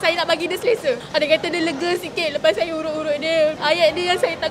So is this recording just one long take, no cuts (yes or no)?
no